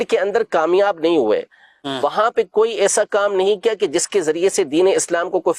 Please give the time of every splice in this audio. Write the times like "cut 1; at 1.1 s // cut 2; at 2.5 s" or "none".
none